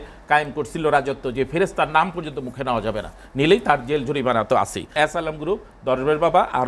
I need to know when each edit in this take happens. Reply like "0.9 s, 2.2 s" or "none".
5.0 s